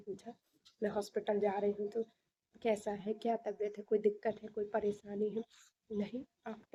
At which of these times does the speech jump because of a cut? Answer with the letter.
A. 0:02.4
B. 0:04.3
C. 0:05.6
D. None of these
D